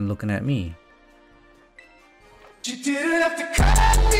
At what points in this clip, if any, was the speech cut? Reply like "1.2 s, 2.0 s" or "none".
none